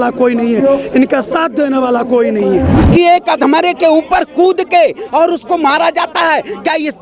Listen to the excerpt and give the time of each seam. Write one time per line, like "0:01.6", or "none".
0:02.7